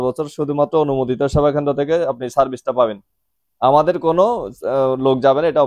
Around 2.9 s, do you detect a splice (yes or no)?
no